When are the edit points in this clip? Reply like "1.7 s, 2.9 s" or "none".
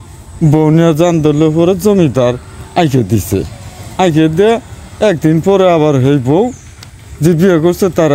none